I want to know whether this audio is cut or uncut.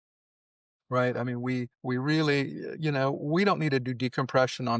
cut